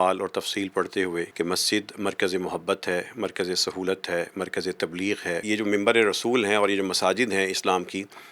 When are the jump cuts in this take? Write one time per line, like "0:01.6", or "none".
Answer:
0:01.3
0:05.4